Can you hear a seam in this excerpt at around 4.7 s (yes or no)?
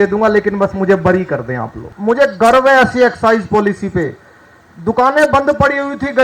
no